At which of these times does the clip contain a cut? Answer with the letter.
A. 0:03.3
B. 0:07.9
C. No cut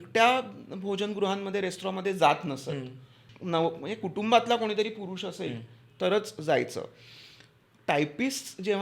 A